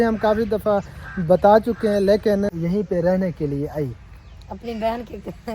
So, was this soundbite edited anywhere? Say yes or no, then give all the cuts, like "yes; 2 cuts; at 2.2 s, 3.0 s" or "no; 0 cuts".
yes; 1 cut; at 2.6 s